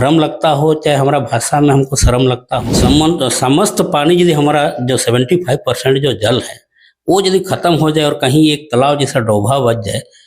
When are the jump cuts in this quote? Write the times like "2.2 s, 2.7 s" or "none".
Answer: 2.7 s

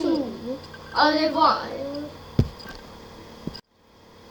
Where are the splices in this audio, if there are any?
none

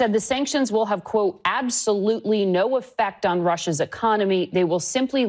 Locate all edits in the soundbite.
none

